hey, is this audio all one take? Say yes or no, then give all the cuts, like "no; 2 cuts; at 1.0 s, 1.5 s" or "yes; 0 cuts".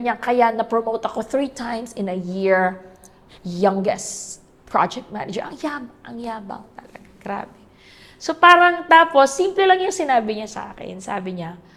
yes; 0 cuts